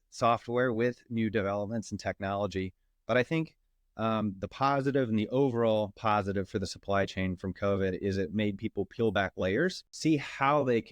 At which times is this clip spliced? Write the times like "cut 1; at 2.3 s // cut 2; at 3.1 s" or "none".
cut 1; at 9.9 s